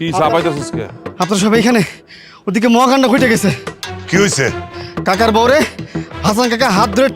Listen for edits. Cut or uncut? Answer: uncut